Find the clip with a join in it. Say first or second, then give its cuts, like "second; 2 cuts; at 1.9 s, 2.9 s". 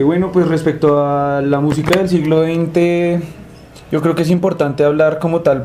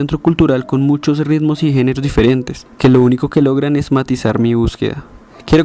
first; 1 cut; at 4.5 s